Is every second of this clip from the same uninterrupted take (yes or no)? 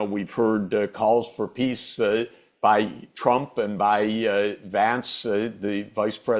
yes